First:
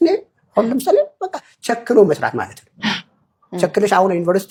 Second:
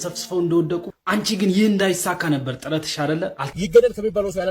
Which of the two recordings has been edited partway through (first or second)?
second